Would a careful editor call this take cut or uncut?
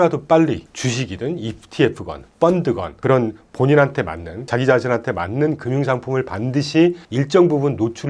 uncut